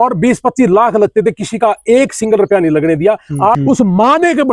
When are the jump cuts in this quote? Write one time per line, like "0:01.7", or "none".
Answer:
0:03.6